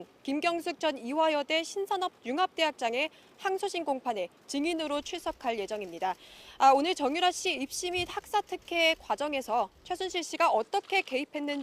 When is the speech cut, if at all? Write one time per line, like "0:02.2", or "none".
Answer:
0:03.8